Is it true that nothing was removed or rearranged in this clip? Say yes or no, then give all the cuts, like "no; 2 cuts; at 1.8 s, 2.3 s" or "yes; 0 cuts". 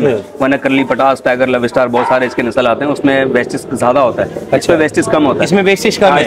yes; 0 cuts